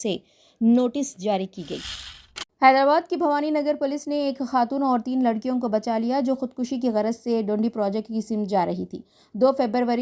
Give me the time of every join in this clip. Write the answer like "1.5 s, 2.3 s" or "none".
2.2 s